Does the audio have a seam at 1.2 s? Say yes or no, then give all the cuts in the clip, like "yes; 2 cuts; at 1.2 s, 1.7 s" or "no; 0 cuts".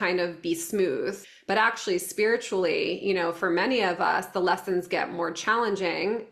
yes; 1 cut; at 1.2 s